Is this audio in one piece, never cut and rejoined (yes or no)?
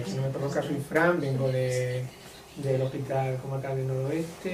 yes